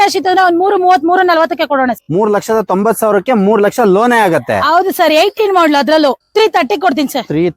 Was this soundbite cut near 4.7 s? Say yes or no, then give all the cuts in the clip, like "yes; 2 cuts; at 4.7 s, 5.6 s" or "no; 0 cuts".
no; 2 cuts; at 2.0 s, 6.2 s